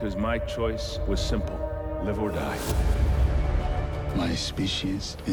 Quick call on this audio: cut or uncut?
uncut